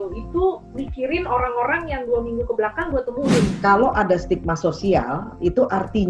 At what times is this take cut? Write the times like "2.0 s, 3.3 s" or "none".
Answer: 3.5 s